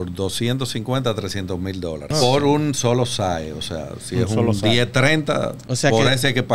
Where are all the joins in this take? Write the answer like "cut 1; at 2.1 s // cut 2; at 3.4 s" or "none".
cut 1; at 2.1 s // cut 2; at 5.6 s